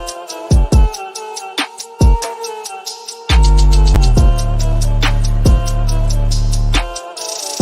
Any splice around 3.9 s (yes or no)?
yes